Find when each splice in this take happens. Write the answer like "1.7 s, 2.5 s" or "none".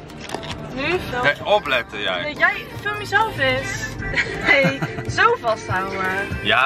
1.1 s, 4.1 s